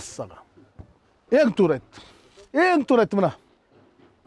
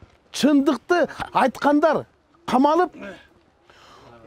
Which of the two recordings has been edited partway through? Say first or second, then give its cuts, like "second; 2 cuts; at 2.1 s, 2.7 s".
first; 1 cut; at 1.2 s